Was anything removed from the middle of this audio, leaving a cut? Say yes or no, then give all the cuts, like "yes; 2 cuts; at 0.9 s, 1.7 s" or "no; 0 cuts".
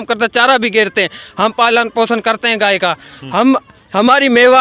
no; 0 cuts